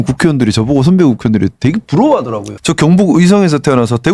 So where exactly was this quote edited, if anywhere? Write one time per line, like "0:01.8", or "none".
0:02.5